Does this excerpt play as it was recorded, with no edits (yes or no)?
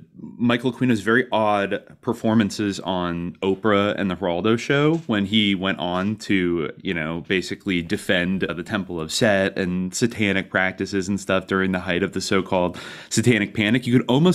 yes